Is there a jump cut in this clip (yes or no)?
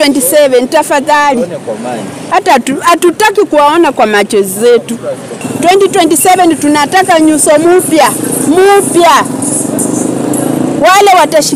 yes